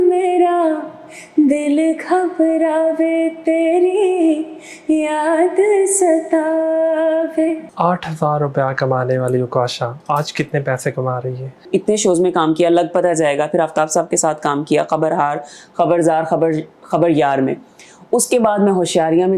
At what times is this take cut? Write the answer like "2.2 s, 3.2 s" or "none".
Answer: 7.7 s, 11.6 s